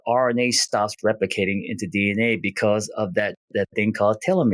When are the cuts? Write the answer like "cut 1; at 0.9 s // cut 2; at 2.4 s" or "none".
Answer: none